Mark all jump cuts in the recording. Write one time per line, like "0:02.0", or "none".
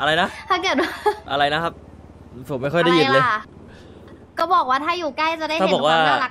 0:01.2